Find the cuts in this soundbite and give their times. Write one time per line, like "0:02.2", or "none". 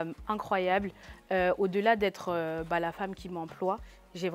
none